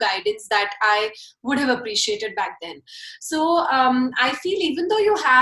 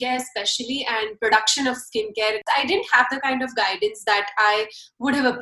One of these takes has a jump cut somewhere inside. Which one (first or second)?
second